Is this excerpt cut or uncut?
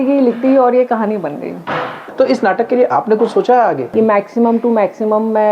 cut